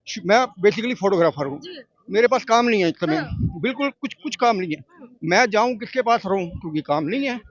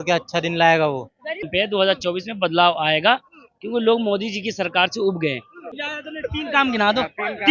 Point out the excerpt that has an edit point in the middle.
second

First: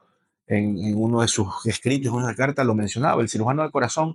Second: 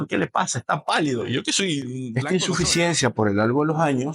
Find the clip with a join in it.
second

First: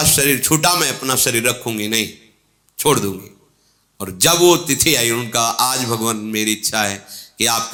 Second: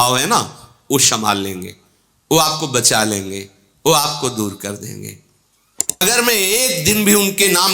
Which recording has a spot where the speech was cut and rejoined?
second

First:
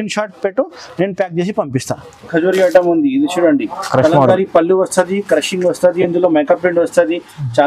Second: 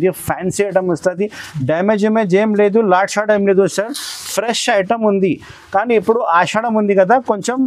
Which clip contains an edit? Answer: first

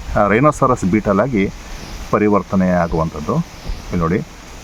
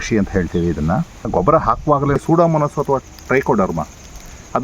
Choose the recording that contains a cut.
second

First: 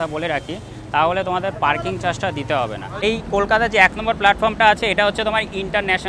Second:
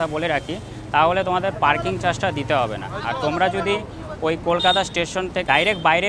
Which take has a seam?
first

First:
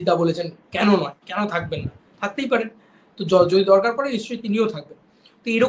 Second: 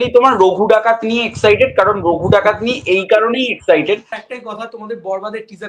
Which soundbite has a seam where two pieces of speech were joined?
second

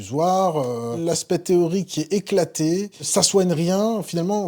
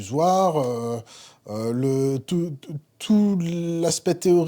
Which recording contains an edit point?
first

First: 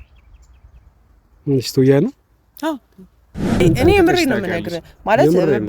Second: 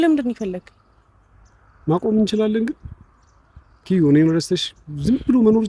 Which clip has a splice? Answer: first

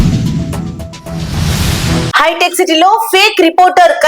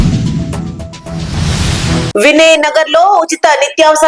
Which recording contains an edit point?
first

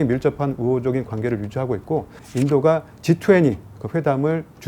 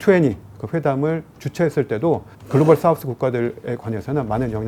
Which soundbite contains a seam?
first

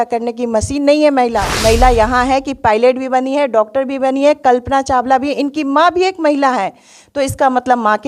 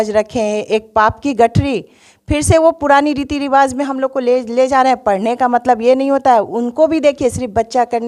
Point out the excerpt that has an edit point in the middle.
first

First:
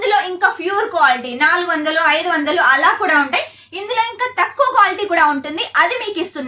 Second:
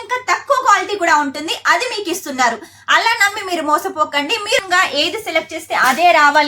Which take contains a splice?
second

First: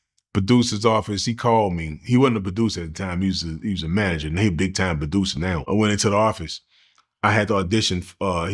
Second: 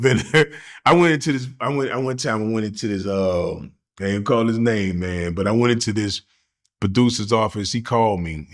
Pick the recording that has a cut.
first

